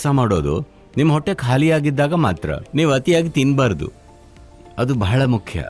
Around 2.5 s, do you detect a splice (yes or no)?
yes